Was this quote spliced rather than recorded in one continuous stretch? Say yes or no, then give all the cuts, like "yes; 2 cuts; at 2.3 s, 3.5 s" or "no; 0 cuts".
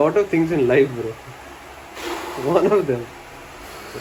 no; 0 cuts